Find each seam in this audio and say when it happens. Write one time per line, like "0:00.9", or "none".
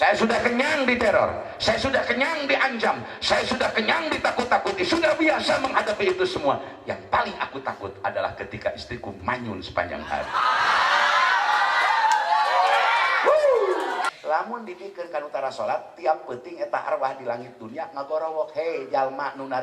0:14.1